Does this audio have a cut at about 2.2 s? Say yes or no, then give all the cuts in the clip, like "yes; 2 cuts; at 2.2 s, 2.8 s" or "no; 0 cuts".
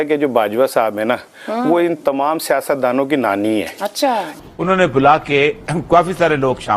no; 1 cut; at 4.3 s